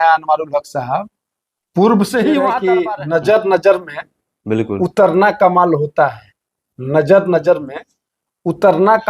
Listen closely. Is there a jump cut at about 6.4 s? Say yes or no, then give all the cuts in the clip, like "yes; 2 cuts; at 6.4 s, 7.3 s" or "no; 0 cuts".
no; 1 cut; at 2.6 s